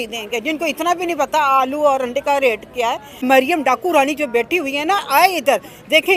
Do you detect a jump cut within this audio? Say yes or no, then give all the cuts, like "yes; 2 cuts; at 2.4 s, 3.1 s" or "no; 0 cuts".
yes; 1 cut; at 3.2 s